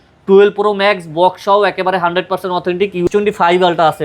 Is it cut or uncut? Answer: cut